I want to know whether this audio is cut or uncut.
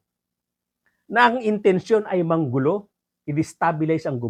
uncut